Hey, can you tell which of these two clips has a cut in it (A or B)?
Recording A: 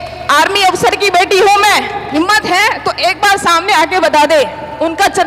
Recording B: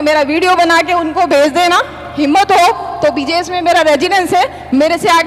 A